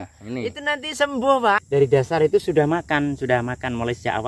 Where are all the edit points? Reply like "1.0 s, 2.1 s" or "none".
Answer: 1.6 s